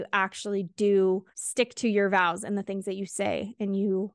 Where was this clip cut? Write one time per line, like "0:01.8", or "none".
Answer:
0:01.4